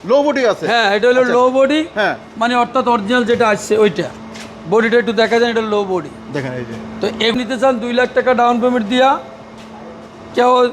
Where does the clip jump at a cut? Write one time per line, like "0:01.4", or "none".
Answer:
0:07.4